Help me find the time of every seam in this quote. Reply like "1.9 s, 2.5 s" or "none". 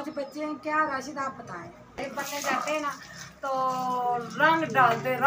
2.0 s